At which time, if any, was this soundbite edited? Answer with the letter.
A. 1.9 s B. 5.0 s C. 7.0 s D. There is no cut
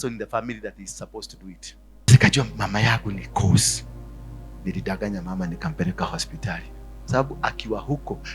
A